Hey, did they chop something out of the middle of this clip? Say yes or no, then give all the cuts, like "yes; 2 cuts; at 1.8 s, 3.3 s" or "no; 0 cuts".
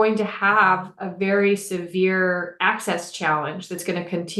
no; 0 cuts